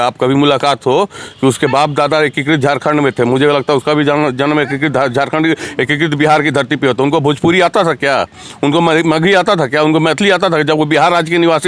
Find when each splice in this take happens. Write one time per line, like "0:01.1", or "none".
none

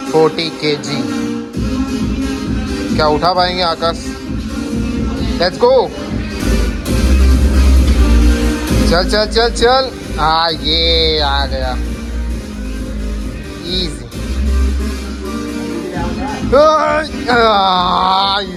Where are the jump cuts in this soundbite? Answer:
none

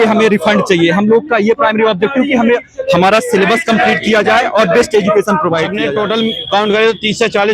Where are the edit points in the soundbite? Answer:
0:05.8

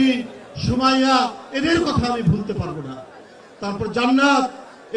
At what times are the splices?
none

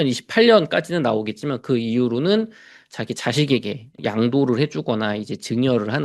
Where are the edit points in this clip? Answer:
none

